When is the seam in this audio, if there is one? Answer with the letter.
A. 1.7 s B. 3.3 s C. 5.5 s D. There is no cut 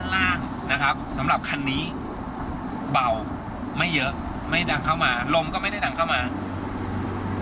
D